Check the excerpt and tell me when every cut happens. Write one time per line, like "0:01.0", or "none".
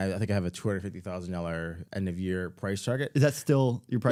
none